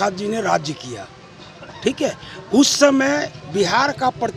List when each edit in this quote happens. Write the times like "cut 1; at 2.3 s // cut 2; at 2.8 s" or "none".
none